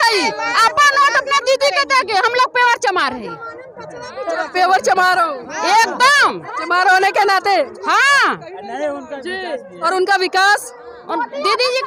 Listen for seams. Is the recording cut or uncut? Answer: uncut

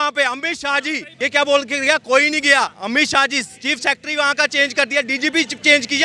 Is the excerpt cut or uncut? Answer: cut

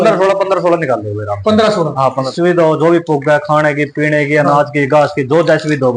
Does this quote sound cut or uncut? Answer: cut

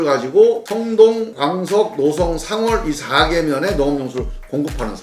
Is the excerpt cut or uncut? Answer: uncut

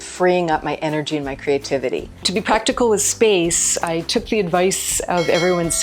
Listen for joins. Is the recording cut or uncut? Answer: cut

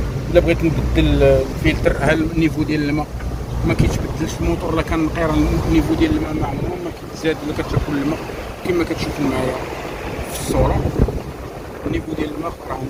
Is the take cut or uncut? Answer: uncut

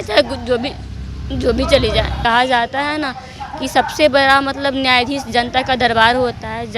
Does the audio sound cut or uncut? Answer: cut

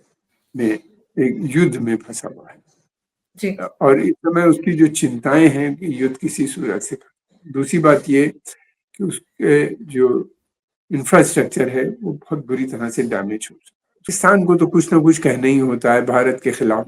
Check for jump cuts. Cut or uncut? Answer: cut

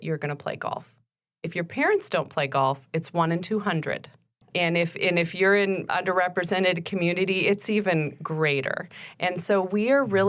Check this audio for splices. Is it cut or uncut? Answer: cut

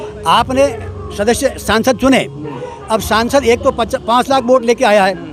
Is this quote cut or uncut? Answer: uncut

